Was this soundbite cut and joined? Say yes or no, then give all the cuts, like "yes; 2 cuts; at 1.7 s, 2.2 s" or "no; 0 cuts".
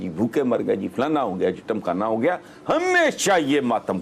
no; 0 cuts